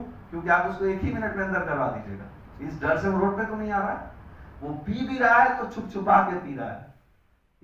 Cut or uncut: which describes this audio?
uncut